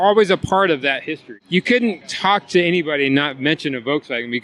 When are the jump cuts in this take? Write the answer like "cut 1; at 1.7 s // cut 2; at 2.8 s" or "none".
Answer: cut 1; at 1.3 s // cut 2; at 2.1 s